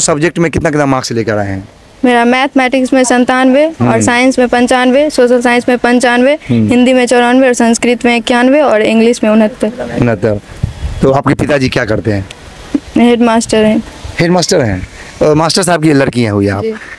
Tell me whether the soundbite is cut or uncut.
uncut